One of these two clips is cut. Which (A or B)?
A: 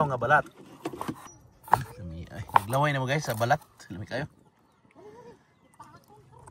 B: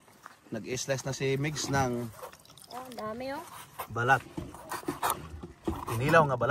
A